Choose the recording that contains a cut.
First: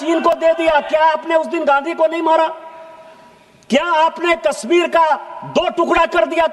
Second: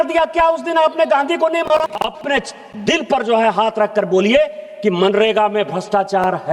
second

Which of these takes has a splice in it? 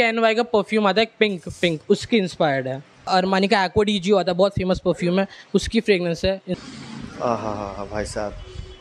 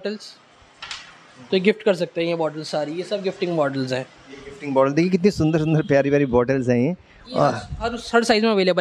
first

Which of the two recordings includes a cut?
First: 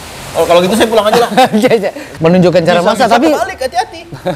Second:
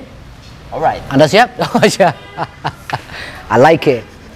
first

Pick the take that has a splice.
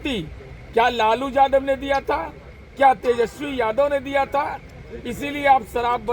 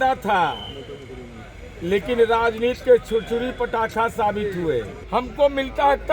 second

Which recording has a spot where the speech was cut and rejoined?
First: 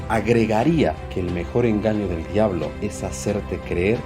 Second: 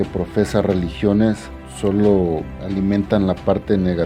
first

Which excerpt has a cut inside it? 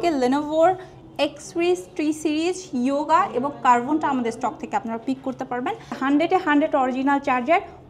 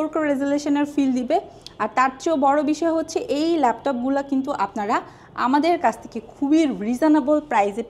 first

